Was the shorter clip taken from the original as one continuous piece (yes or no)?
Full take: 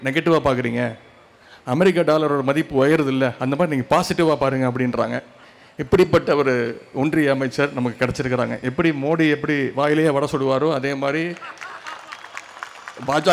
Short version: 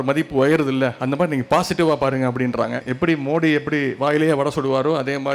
no